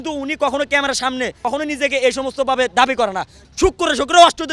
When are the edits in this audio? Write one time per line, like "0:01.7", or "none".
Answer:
0:01.4
0:03.4